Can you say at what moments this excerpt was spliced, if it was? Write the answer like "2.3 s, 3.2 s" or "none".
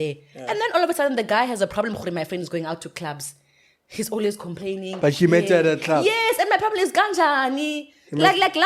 none